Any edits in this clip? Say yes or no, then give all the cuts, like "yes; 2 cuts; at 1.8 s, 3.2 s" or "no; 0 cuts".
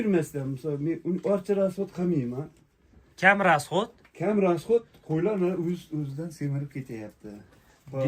no; 0 cuts